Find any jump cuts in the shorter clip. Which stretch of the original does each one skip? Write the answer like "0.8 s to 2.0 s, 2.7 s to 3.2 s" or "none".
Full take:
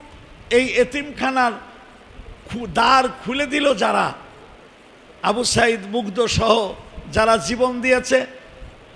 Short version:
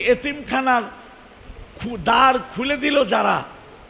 none